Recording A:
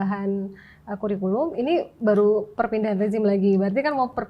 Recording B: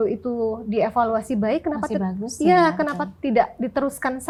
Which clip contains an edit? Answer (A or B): A